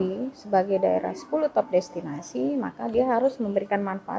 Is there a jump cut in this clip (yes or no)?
no